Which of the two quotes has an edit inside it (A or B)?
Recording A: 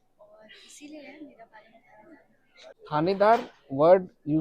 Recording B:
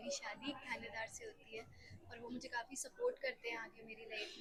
A